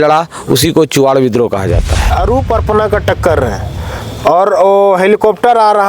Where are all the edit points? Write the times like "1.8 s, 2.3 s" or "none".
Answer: 2.1 s

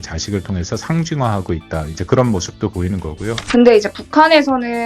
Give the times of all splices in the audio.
3.4 s

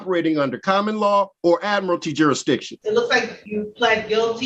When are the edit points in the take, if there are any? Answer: 1.3 s, 2.7 s, 3.4 s

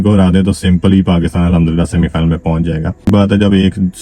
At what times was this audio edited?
3.1 s

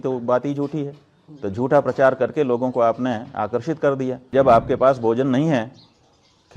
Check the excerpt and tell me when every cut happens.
4.2 s

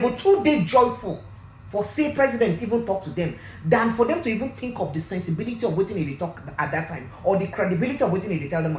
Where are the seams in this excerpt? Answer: none

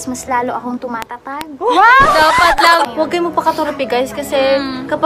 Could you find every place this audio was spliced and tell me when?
2.8 s

